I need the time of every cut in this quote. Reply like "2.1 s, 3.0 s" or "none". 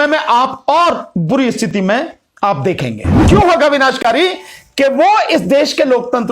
3.2 s